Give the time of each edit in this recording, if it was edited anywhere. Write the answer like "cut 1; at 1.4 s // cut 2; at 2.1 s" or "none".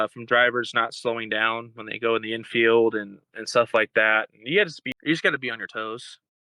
cut 1; at 4.9 s